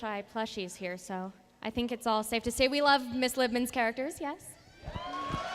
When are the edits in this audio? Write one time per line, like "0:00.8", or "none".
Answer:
0:01.2